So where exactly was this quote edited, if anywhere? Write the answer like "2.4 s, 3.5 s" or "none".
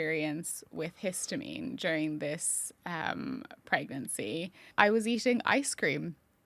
4.7 s